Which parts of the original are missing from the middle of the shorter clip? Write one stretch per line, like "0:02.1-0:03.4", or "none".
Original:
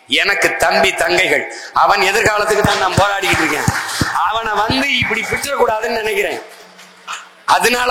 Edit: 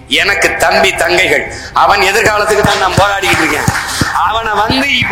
none